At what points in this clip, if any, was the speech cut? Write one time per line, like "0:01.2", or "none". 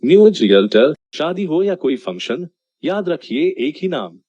0:01.1